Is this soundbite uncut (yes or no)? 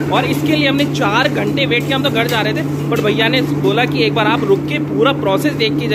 yes